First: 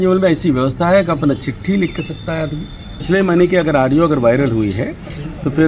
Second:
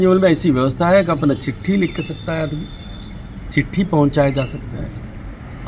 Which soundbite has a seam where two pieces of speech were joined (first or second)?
first